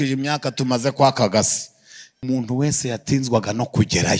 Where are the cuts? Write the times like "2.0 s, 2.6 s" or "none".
2.2 s